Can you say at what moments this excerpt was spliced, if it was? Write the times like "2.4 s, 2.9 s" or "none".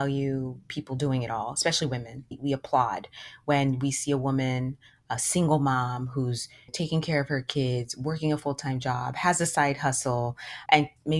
none